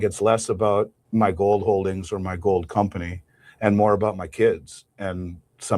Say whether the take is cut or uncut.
cut